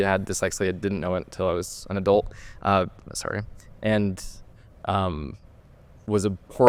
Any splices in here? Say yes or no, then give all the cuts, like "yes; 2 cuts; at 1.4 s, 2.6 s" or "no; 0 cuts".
no; 0 cuts